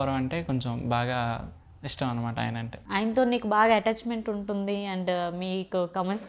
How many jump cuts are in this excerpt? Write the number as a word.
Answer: zero